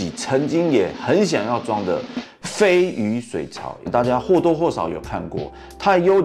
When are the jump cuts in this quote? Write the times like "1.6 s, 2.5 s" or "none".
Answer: 3.7 s